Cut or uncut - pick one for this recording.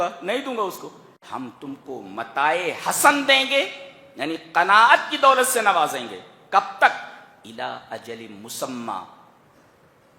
cut